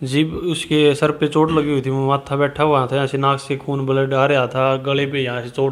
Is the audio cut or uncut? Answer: uncut